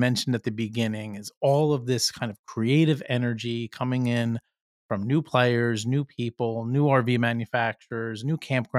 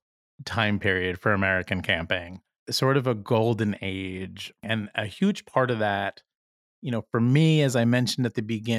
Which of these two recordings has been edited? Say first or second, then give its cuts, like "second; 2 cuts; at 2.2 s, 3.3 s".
second; 2 cuts; at 2.6 s, 4.6 s